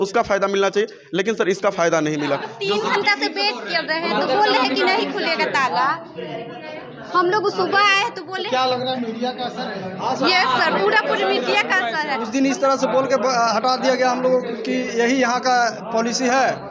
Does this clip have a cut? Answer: yes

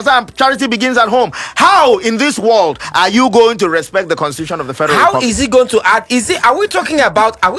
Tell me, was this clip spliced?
no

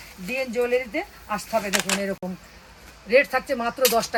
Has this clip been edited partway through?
no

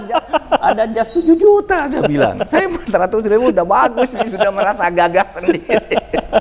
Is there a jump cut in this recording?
no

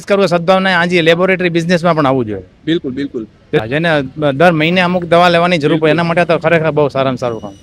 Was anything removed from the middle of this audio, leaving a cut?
yes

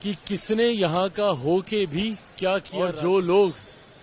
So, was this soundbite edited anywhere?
yes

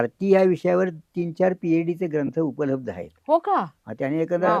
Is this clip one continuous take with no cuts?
yes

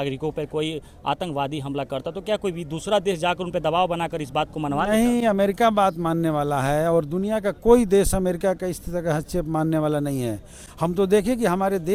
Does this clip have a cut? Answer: no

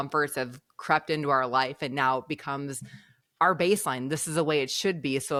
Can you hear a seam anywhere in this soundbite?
no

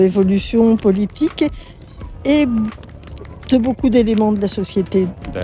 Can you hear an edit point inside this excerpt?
no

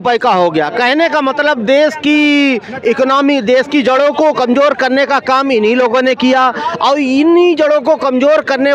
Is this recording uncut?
yes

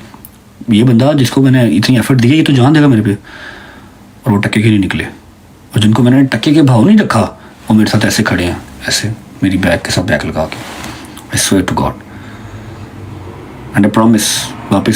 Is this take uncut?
yes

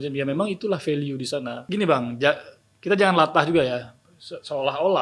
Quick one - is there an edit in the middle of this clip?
yes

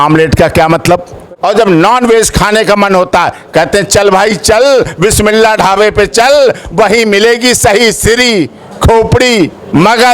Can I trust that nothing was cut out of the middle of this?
no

